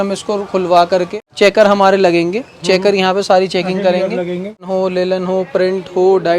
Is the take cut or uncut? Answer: cut